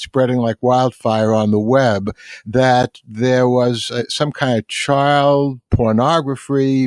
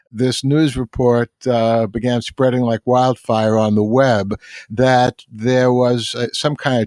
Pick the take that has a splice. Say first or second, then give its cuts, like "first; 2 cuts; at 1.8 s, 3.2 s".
first; 1 cut; at 5.6 s